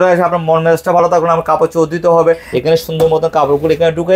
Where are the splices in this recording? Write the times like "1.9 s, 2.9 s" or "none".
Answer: 2.5 s